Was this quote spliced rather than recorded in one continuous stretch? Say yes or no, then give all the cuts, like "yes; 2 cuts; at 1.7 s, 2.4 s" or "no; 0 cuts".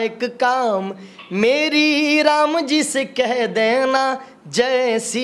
no; 0 cuts